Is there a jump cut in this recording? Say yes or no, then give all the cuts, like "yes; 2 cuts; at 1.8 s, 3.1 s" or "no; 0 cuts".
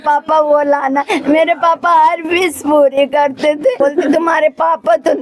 yes; 1 cut; at 3.8 s